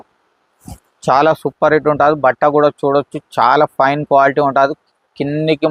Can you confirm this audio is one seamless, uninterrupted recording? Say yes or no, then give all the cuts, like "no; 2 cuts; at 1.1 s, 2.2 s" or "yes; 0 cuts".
yes; 0 cuts